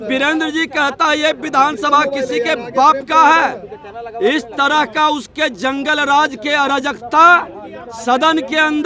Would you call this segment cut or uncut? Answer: uncut